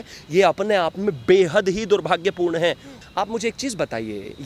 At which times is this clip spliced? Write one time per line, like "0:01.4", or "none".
0:02.9